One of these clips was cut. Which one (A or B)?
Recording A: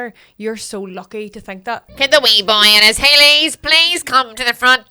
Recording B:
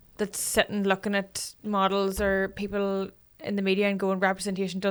A